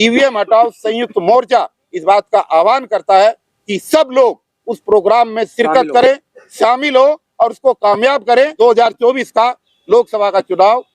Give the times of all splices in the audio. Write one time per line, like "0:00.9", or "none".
0:08.5